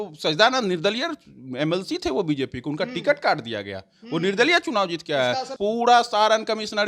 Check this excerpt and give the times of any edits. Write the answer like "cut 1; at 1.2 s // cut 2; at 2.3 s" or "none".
cut 1; at 5.5 s